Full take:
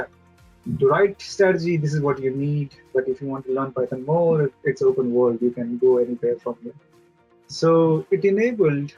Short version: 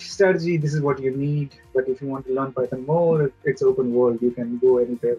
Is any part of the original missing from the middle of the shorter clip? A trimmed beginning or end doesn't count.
no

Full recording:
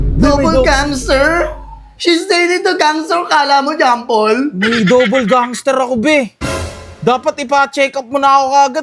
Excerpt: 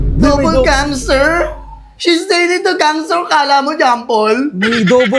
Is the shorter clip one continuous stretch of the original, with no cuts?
yes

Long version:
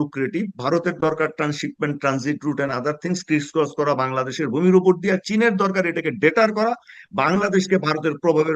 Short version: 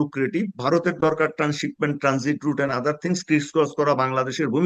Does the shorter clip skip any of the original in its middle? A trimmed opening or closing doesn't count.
no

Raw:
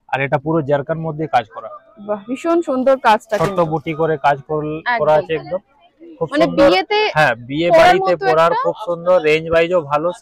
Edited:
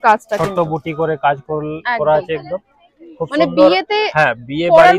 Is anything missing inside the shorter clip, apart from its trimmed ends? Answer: no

